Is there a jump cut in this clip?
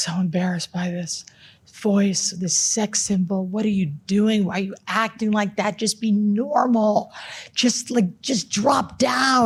no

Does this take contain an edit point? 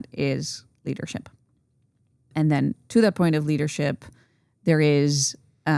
yes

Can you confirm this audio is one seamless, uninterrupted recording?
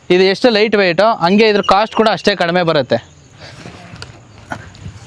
yes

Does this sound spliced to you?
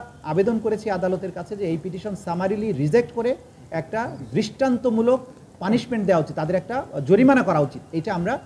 no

